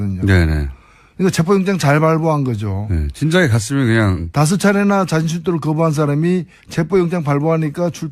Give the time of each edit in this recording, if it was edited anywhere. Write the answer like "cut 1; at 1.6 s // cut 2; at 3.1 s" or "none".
cut 1; at 4.0 s